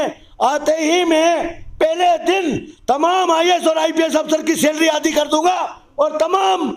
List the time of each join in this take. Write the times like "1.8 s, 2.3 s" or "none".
none